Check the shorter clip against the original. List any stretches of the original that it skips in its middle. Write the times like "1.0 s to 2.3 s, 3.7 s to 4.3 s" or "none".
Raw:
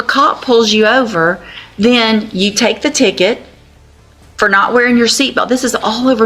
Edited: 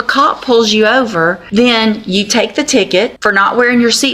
1.4 s to 1.7 s, 3.4 s to 4.3 s